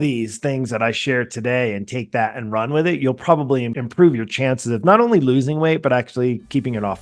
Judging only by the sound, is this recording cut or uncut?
uncut